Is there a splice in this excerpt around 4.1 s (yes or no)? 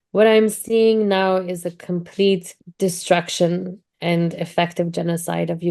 no